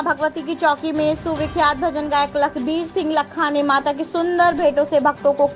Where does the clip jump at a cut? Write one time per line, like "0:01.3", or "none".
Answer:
none

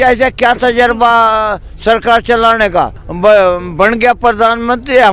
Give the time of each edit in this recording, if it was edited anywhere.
0:03.0

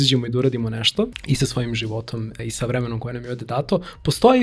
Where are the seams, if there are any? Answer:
0:01.2
0:02.3

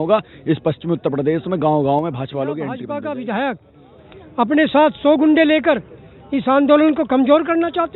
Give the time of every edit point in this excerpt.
0:02.8

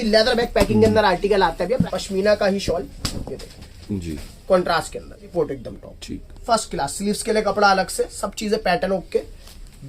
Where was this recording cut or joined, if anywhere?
0:01.8
0:05.3

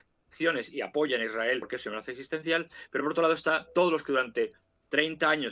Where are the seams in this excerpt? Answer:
0:01.7

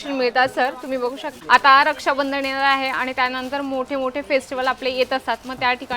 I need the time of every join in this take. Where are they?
0:01.3

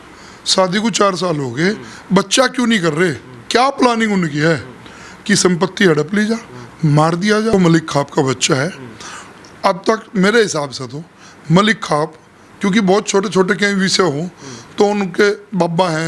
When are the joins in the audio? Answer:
0:07.5

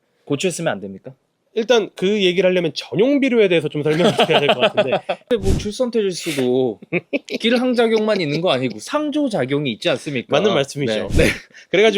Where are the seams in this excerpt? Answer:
0:05.3
0:11.1

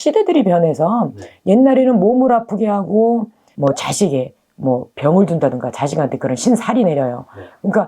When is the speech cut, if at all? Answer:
0:03.4

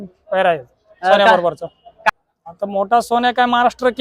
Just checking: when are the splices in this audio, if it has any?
0:01.9

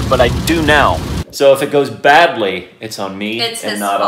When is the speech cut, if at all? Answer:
0:01.1

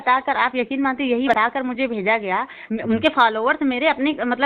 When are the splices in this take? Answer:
0:01.3

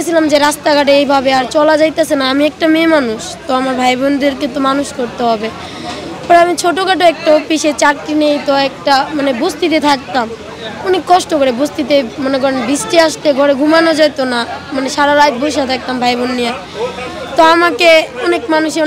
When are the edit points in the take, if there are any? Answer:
none

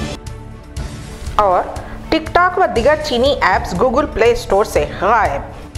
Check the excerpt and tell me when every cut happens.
0:00.9

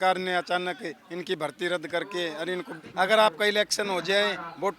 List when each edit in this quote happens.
0:02.8

